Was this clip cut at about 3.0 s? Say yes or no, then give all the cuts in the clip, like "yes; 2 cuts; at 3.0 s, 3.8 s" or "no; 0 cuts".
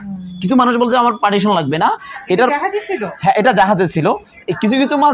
no; 0 cuts